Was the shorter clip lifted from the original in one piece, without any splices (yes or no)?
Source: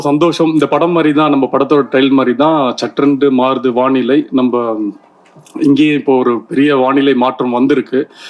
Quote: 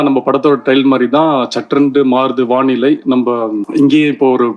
no